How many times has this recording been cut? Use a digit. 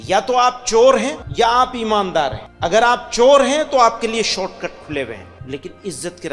3